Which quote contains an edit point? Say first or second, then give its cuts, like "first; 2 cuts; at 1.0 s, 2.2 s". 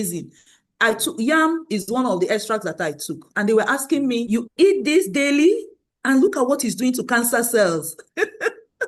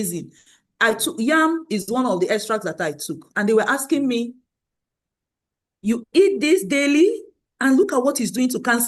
first; 1 cut; at 4.3 s